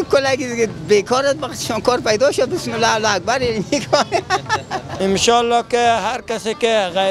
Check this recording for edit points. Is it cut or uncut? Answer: cut